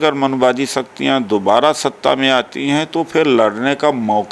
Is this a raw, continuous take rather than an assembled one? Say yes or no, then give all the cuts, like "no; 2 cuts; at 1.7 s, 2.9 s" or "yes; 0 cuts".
yes; 0 cuts